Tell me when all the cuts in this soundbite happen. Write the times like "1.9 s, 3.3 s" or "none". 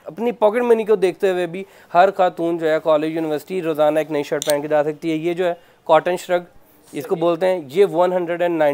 none